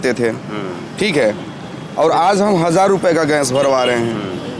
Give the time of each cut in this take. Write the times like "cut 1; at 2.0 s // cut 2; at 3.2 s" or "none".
none